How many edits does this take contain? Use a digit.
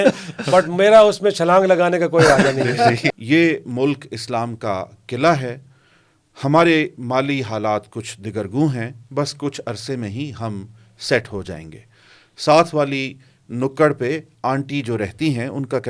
1